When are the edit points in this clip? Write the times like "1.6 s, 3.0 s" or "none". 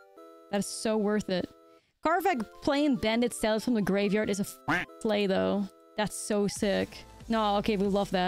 7.1 s